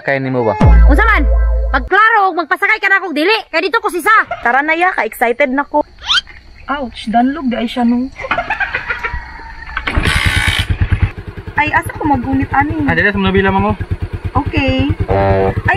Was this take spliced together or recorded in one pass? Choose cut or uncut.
cut